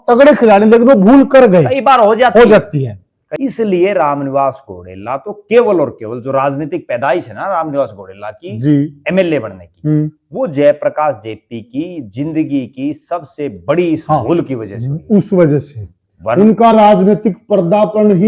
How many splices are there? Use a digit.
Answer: 1